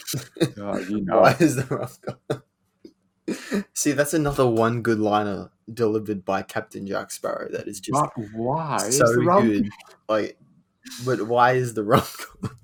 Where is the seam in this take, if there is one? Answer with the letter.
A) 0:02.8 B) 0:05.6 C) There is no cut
C